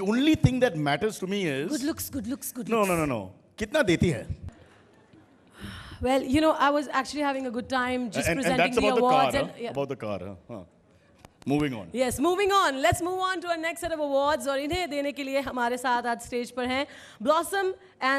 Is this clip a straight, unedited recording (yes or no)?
no